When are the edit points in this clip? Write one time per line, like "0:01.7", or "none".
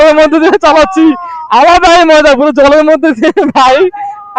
none